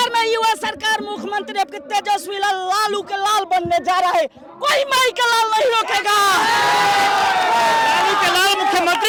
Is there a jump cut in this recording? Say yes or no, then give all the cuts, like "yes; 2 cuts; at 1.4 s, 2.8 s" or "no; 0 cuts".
no; 0 cuts